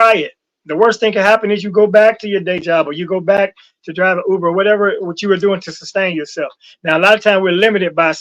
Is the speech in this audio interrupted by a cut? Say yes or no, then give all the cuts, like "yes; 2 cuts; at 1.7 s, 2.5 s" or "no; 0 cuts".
no; 0 cuts